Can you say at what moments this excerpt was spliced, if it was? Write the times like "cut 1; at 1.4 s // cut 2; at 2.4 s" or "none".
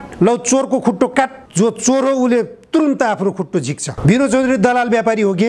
cut 1; at 1.4 s // cut 2; at 3.8 s